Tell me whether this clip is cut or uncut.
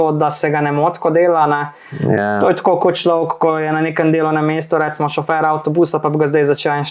uncut